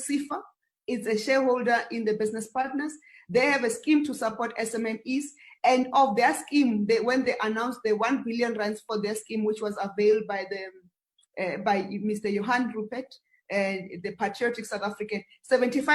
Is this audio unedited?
yes; 0 cuts

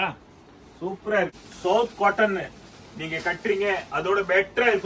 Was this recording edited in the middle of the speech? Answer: yes; 1 cut; at 1.3 s

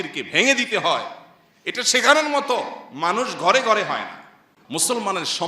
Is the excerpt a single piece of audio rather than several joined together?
no; 1 cut; at 4.5 s

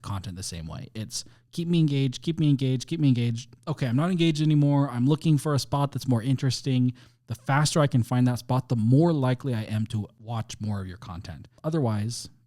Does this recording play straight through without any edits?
no; 2 cuts; at 10.2 s, 11.5 s

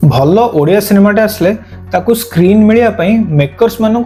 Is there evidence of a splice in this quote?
no; 0 cuts

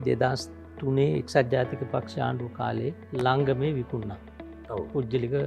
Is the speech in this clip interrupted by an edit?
yes; 1 cut; at 3.0 s

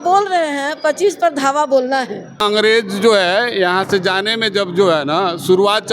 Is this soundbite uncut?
no; 1 cut; at 2.4 s

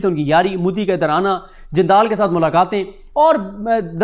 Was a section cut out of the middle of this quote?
no; 0 cuts

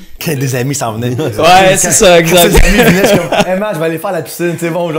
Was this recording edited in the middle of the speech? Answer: no; 0 cuts

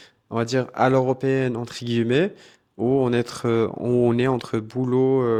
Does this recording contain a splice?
no; 0 cuts

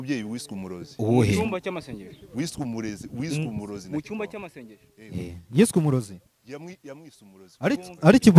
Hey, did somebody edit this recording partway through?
no; 0 cuts

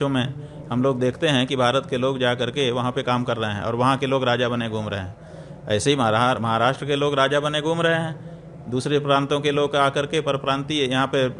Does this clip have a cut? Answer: no; 0 cuts

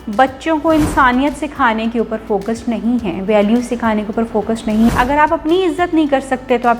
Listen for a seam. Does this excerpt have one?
yes; 1 cut; at 4.9 s

